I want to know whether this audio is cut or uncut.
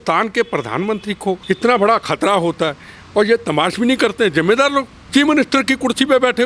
cut